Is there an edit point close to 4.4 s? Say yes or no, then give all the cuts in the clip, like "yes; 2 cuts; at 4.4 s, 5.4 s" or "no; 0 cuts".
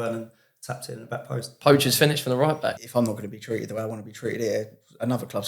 no; 2 cuts; at 1.5 s, 2.8 s